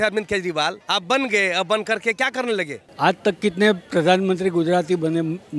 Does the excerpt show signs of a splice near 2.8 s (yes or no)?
yes